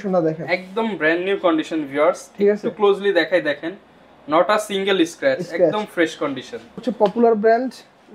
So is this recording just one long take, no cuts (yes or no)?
no